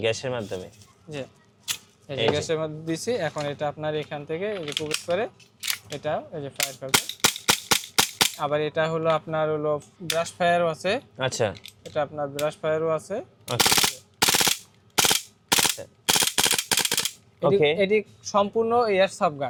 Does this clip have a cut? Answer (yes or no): no